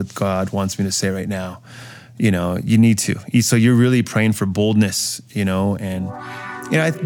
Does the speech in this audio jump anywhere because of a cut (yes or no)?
no